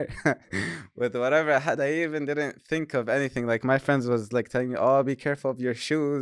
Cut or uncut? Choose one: uncut